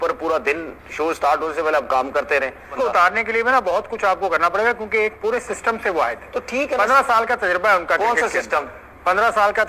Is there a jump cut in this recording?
yes; 1 cut; at 2.7 s

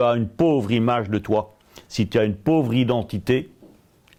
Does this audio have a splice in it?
no; 0 cuts

